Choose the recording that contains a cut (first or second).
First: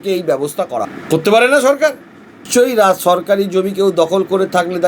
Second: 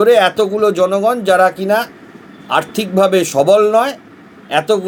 first